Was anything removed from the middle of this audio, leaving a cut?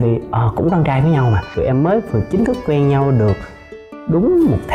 yes; 1 cut; at 1.5 s

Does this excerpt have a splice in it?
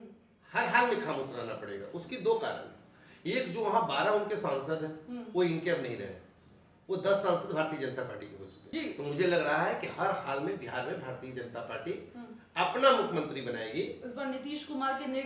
yes; 1 cut; at 8.6 s

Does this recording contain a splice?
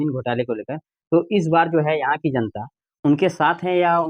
no; 0 cuts

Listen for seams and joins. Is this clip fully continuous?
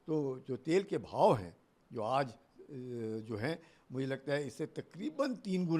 yes; 0 cuts

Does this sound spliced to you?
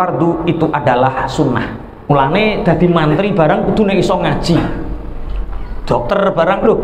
yes; 1 cut; at 2.1 s

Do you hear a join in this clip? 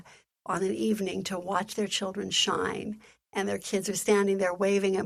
no; 0 cuts

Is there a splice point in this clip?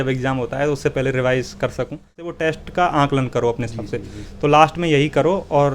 yes; 1 cut; at 2.3 s

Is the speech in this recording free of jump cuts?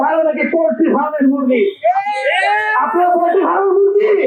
yes; 0 cuts

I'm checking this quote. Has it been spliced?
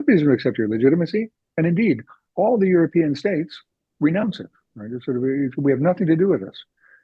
no; 0 cuts

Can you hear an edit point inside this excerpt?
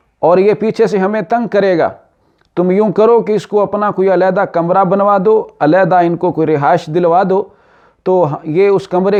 no; 0 cuts

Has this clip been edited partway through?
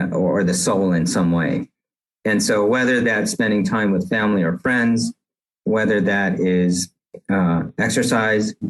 no; 0 cuts

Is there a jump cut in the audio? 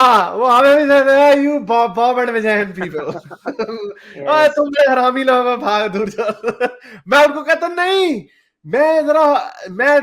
no; 0 cuts

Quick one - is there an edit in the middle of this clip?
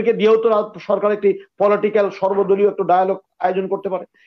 no; 0 cuts

